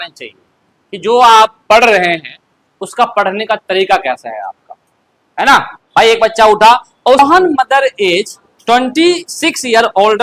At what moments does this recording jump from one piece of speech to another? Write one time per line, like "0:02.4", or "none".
0:07.2